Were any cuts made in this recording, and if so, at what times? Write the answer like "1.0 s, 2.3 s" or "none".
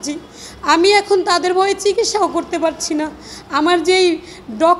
none